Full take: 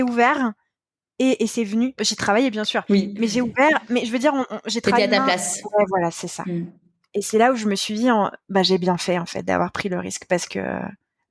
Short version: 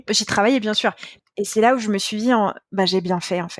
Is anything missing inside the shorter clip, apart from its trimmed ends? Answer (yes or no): yes